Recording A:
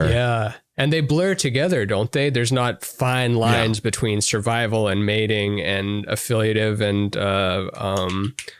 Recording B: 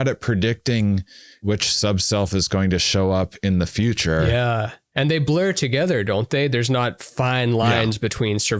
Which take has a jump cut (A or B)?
B